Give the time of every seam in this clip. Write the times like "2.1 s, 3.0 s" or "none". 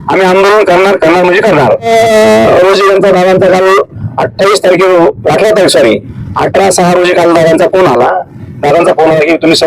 1.9 s